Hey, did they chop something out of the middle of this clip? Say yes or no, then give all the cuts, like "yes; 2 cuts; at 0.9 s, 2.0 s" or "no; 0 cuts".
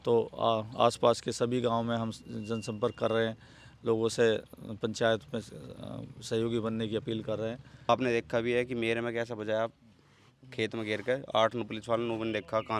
yes; 1 cut; at 7.9 s